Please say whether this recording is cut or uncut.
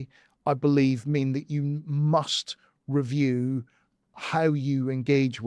uncut